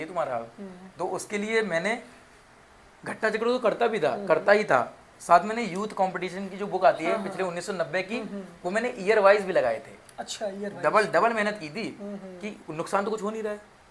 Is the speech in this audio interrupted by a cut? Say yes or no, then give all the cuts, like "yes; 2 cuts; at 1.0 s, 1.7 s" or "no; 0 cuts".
no; 0 cuts